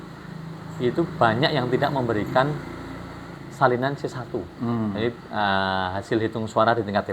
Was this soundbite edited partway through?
no; 0 cuts

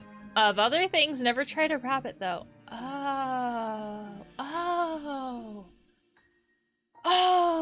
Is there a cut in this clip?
no; 0 cuts

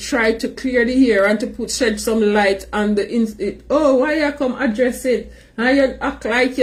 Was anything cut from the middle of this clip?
no; 0 cuts

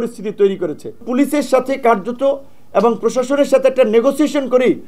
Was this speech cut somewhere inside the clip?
yes; 1 cut; at 1.0 s

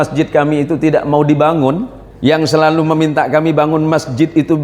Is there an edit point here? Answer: yes; 1 cut; at 2.5 s

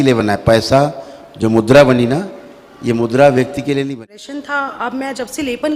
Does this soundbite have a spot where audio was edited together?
yes; 1 cut; at 3.9 s

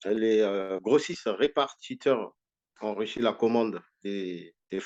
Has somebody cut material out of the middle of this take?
no; 0 cuts

